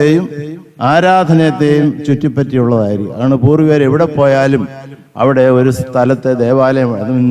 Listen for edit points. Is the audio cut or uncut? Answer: uncut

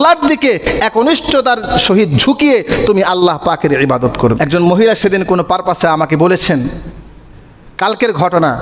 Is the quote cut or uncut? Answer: cut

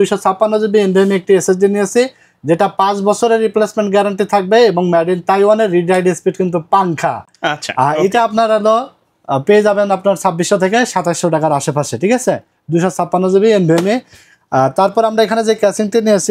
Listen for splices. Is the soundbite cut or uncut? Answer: uncut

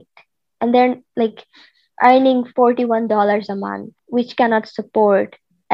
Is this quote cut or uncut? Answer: uncut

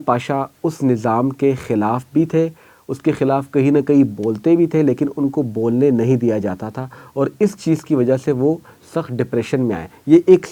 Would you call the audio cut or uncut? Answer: uncut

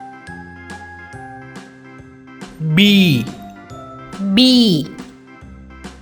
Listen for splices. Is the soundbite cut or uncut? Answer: cut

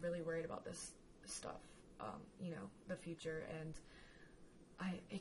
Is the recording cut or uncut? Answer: cut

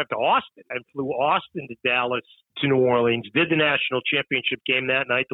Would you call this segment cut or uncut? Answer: cut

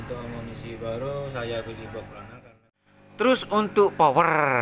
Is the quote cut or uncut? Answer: cut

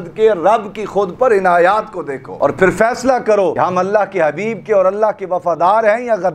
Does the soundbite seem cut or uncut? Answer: uncut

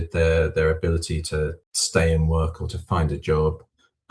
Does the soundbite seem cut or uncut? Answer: uncut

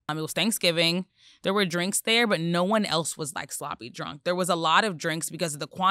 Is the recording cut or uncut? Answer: uncut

